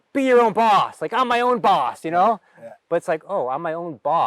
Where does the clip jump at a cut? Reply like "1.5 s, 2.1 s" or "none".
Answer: none